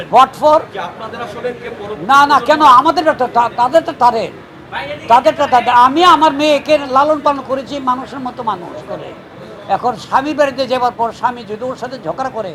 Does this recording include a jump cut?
no; 0 cuts

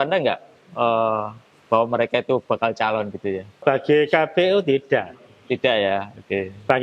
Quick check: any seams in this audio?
yes; 1 cut; at 3.6 s

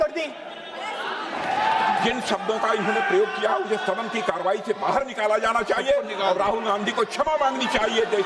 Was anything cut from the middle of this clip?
yes; 1 cut; at 1.4 s

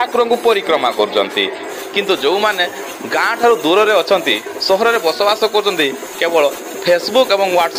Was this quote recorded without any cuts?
no; 1 cut; at 1.7 s

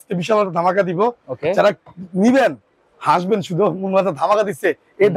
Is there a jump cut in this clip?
no; 0 cuts

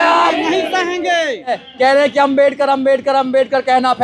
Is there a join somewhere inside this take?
yes; 1 cut; at 1.6 s

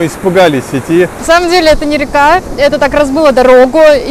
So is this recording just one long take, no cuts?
no; 1 cut; at 1.2 s

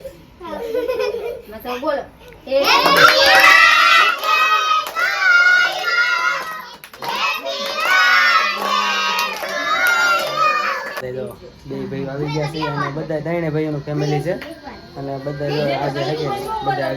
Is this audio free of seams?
no; 1 cut; at 11.0 s

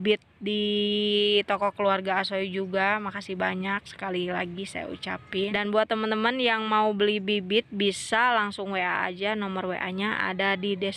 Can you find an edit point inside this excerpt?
yes; 1 cut; at 5.5 s

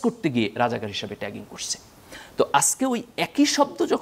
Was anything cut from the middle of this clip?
no; 0 cuts

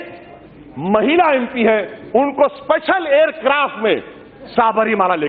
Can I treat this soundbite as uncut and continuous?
yes; 0 cuts

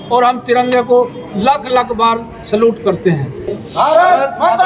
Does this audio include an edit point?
yes; 1 cut; at 3.5 s

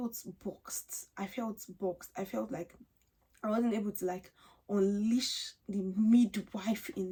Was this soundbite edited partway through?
no; 0 cuts

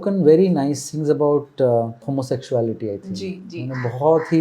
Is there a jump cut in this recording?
yes; 1 cut; at 2.1 s

